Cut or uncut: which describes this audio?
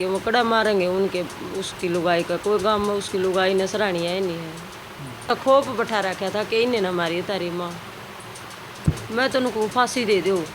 cut